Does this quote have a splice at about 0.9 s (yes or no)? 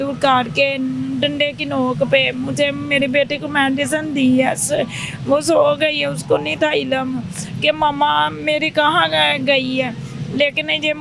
no